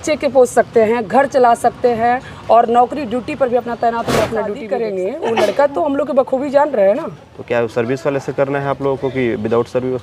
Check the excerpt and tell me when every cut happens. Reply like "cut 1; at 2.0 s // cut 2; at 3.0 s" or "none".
cut 1; at 4.7 s